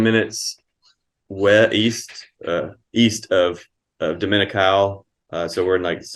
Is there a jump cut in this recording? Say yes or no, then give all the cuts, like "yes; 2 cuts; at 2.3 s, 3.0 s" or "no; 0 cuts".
no; 0 cuts